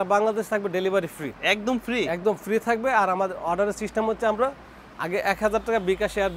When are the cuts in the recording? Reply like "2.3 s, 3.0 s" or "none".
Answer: none